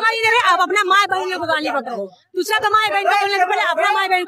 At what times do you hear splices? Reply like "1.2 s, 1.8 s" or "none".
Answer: none